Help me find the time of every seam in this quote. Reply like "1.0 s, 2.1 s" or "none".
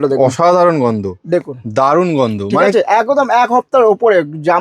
none